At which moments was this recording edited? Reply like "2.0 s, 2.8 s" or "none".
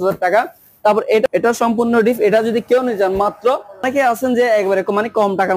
1.3 s, 3.8 s